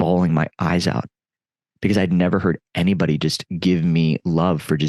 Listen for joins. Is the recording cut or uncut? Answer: uncut